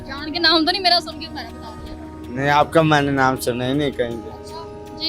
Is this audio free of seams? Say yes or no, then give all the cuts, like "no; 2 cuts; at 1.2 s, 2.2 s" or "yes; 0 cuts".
yes; 0 cuts